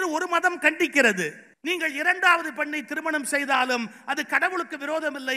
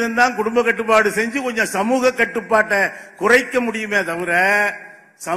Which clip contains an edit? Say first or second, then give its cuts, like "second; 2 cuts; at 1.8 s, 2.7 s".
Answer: first; 1 cut; at 1.5 s